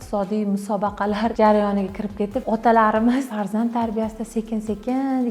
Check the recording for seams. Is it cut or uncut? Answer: cut